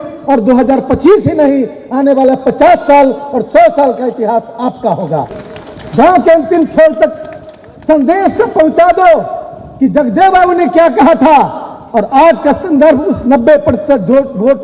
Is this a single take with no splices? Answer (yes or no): no